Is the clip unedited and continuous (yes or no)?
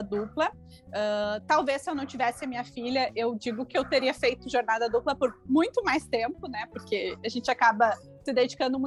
yes